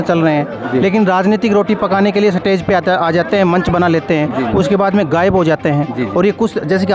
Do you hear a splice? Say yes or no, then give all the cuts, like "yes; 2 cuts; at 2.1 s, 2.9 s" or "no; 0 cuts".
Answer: no; 0 cuts